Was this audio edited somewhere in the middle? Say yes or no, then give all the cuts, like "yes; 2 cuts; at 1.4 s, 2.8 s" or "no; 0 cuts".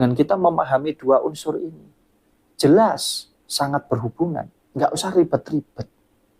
yes; 1 cut; at 4.6 s